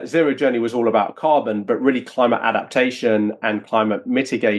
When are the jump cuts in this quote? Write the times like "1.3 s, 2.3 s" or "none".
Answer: none

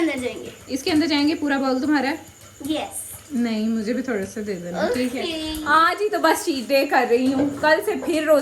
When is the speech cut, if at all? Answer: none

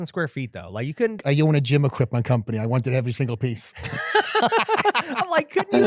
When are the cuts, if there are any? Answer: 1.2 s

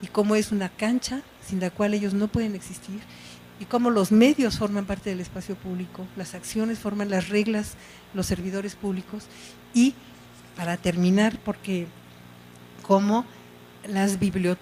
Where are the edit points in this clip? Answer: none

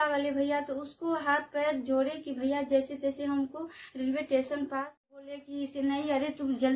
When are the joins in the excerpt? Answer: 5.4 s

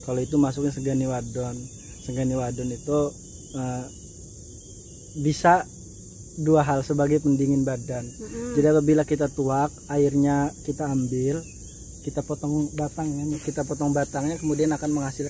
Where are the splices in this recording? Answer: 13.4 s

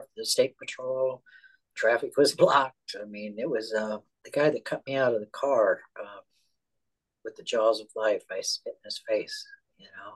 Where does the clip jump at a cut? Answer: 4.1 s

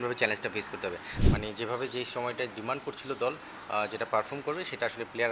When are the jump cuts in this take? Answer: 1.1 s

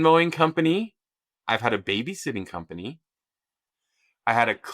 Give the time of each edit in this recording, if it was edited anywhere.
3.4 s

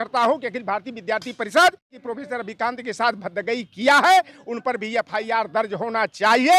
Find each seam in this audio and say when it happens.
2.0 s

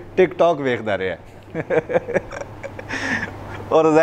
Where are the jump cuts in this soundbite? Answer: none

